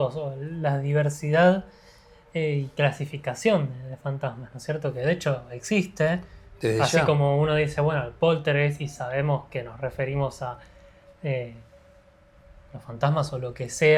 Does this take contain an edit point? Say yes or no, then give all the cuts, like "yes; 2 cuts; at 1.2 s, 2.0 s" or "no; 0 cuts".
no; 0 cuts